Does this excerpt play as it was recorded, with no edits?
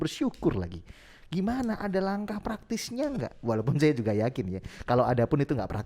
yes; 0 cuts

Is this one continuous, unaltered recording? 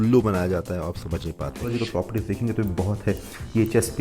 no; 1 cut; at 1.7 s

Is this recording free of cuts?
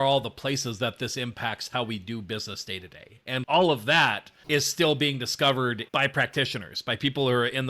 no; 2 cuts; at 3.4 s, 4.3 s

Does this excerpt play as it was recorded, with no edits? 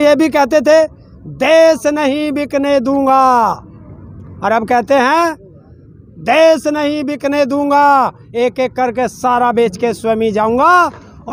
yes; 0 cuts

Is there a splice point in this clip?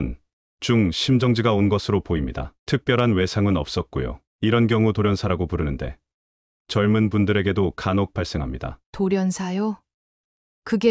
no; 0 cuts

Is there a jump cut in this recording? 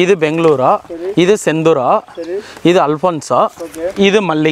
no; 0 cuts

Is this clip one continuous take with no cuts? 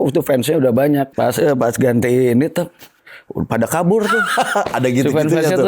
no; 1 cut; at 1.1 s

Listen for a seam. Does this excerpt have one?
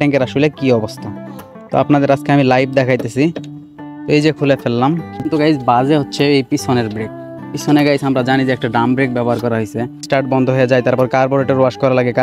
yes; 2 cuts; at 5.2 s, 10.1 s

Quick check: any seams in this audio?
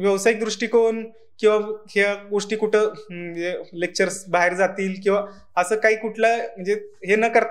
no; 0 cuts

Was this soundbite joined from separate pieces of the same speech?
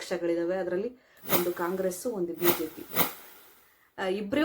yes; 1 cut; at 3.3 s

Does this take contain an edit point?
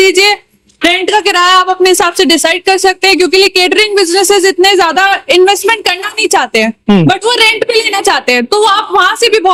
no; 0 cuts

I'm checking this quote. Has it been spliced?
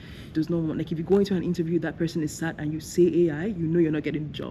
no; 0 cuts

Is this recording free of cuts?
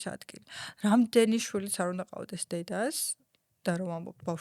yes; 0 cuts

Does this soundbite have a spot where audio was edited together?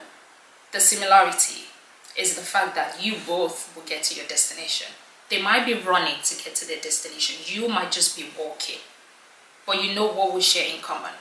no; 0 cuts

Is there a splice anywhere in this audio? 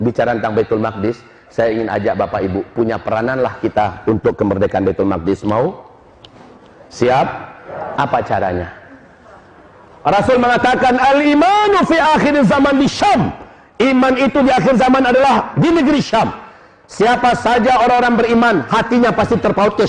no; 0 cuts

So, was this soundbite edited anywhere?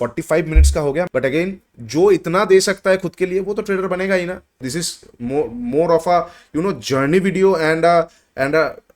yes; 2 cuts; at 1.1 s, 4.5 s

